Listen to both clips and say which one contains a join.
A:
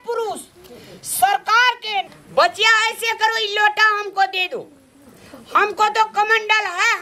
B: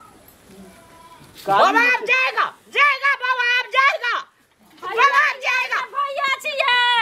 A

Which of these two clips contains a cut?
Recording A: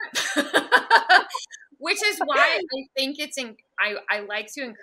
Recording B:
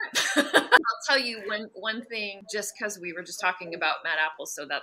B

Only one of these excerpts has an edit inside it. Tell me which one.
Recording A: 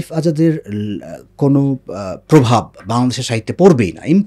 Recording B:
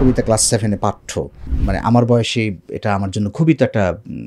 B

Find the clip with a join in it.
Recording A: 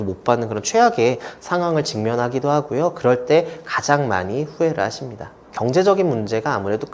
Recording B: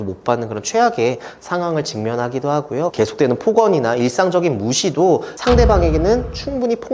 B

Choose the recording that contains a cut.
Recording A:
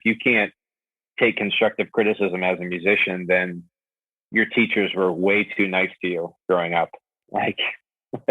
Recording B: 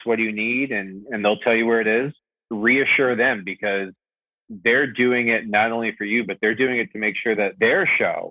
B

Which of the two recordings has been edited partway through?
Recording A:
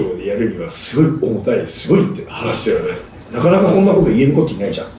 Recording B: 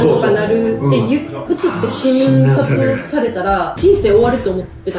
B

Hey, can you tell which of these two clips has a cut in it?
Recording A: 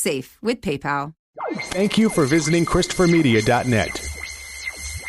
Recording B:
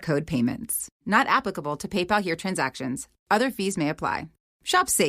A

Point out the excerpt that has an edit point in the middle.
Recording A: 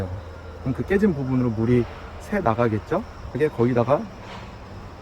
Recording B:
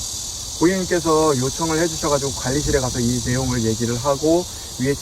A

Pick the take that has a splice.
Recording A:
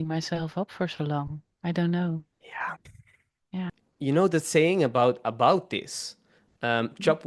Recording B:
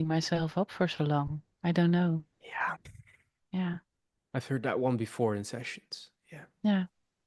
A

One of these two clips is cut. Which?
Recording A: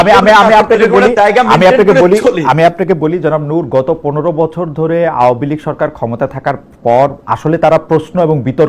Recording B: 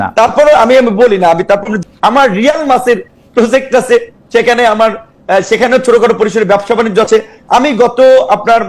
B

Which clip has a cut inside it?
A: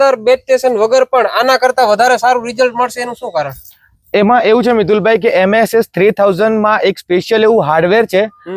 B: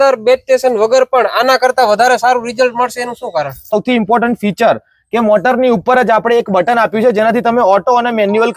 B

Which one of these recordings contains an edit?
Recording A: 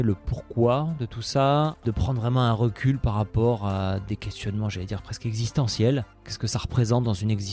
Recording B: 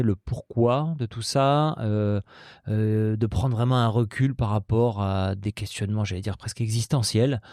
A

